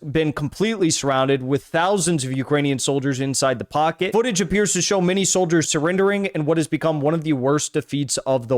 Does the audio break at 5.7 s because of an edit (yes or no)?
yes